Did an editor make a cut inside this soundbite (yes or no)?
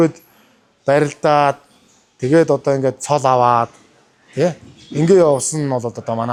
no